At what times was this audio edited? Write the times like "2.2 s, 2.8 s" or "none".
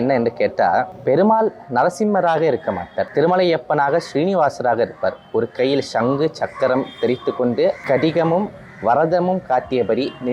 0.9 s, 3.0 s, 7.8 s